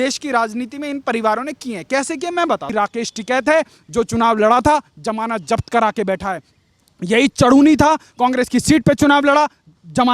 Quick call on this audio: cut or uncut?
cut